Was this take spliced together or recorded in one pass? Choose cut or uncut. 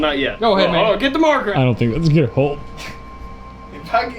cut